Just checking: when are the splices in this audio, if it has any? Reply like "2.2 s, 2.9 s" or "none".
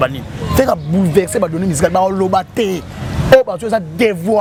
none